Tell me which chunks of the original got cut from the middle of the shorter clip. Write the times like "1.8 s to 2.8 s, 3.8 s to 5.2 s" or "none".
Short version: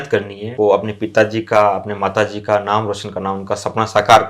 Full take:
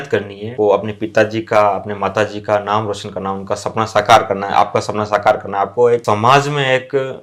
none